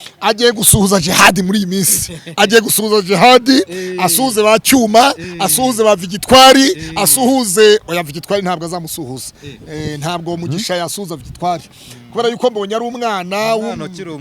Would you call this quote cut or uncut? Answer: uncut